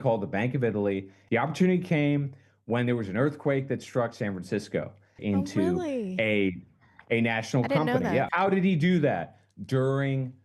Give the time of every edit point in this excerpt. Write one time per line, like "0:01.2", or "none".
0:01.1
0:05.1
0:08.3